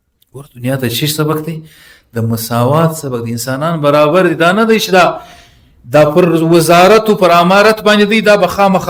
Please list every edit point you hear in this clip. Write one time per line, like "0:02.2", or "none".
none